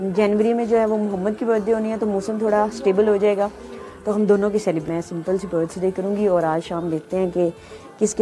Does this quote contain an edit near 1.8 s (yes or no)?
no